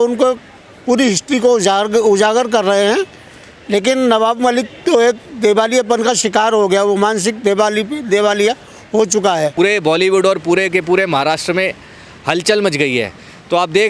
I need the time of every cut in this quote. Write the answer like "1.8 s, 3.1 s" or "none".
9.5 s